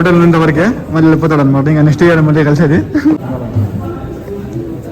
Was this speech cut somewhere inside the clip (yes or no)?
yes